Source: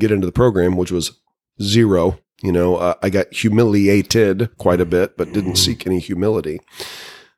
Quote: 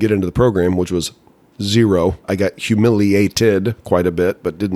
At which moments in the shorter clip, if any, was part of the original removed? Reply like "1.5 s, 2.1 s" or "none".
2.2 s